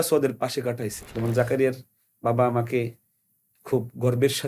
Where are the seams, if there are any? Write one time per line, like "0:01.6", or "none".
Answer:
0:01.0